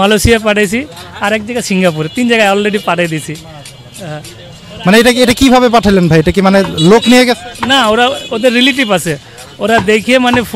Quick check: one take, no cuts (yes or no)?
yes